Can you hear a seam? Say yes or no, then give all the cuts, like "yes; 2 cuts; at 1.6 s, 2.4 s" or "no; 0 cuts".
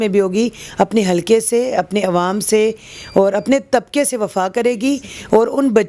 no; 0 cuts